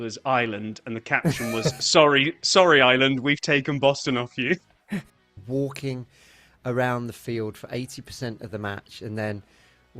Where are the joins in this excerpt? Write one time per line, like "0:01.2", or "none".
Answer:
0:05.2